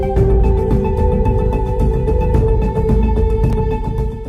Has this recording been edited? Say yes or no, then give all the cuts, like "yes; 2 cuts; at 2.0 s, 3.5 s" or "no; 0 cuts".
yes; 1 cut; at 1.7 s